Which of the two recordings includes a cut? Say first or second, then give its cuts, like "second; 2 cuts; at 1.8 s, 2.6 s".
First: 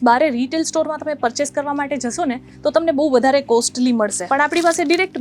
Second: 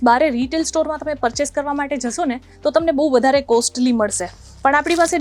first; 1 cut; at 4.2 s